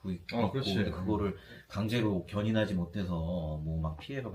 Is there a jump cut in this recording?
no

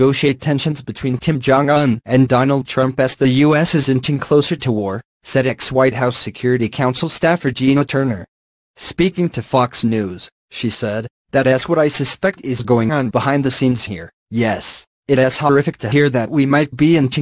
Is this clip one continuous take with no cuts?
yes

